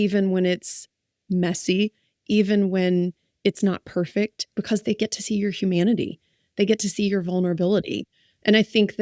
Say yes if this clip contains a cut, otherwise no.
yes